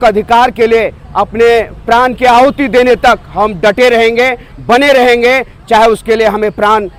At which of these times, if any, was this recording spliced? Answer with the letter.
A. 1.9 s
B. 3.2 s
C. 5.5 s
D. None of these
D